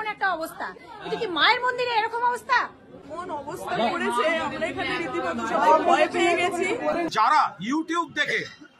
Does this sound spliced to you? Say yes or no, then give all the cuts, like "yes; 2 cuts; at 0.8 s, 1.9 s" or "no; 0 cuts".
yes; 1 cut; at 7.1 s